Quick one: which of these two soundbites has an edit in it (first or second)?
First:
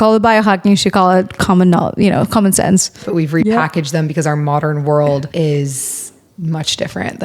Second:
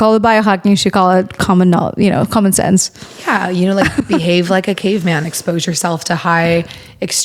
first